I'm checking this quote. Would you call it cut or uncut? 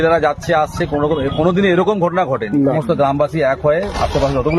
cut